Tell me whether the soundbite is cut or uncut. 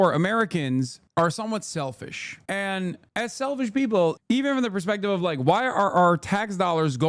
cut